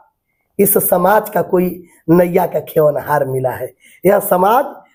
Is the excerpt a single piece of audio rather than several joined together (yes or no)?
yes